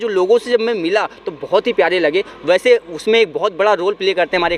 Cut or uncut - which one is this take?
uncut